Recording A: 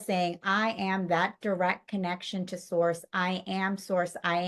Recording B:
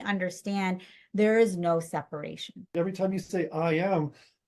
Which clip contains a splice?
B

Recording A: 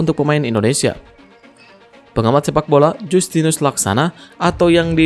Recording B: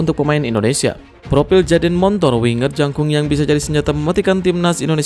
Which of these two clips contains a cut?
B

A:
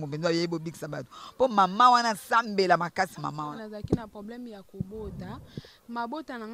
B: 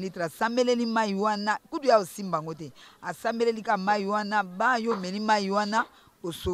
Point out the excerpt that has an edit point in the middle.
A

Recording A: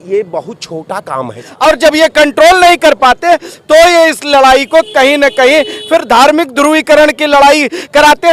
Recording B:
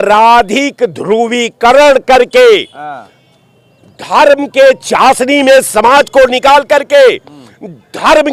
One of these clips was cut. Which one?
A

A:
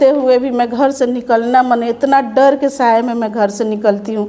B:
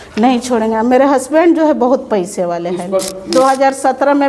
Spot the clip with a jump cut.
B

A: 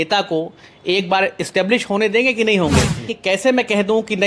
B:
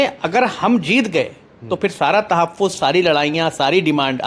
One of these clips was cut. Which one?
A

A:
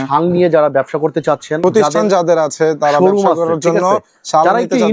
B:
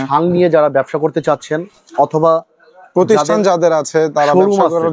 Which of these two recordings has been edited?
A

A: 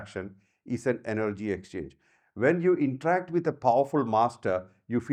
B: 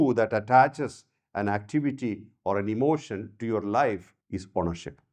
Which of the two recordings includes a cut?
B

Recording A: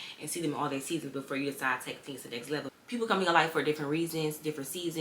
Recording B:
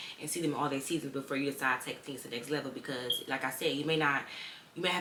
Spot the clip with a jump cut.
A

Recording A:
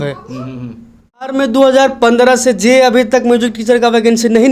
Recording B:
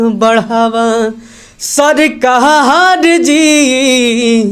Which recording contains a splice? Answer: A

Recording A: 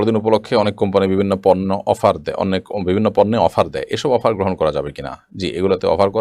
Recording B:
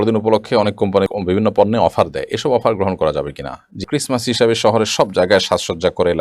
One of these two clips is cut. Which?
B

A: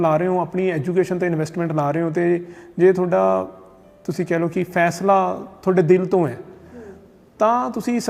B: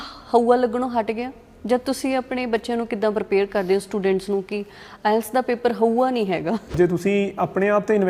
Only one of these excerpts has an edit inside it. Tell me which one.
B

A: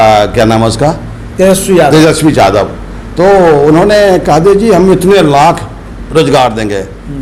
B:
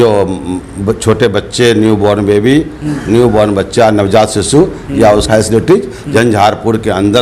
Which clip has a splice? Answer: B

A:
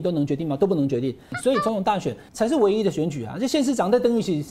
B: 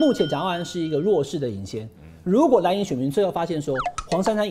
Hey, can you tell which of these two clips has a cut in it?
A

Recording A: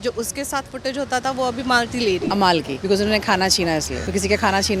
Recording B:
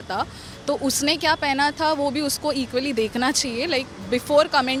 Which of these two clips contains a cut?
A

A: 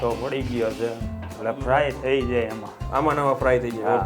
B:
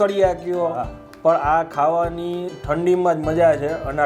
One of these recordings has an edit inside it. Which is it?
A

